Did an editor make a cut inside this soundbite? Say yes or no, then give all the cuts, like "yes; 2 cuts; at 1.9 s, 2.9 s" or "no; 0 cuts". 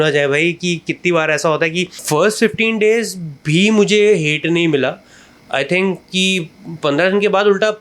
yes; 1 cut; at 1.9 s